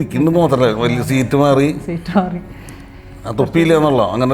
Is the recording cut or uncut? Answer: uncut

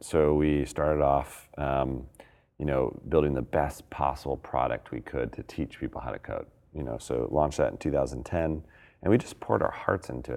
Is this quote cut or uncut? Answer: uncut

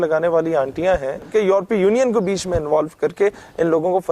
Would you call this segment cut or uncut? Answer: cut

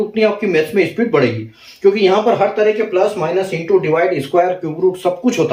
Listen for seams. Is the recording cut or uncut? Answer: uncut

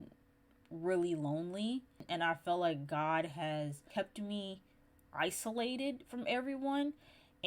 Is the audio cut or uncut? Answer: cut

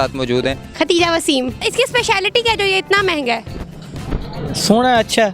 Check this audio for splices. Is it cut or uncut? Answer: cut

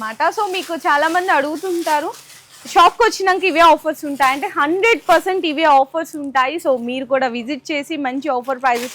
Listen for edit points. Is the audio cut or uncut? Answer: uncut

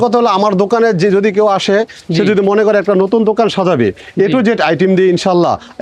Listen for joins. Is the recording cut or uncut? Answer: uncut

